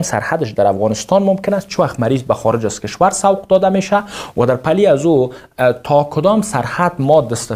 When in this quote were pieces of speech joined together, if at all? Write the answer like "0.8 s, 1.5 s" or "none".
none